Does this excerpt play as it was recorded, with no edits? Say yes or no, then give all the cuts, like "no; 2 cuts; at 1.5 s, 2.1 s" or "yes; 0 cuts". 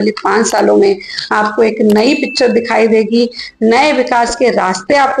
yes; 0 cuts